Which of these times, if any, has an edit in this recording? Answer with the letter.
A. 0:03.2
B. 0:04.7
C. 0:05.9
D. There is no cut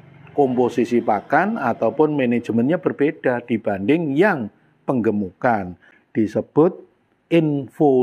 C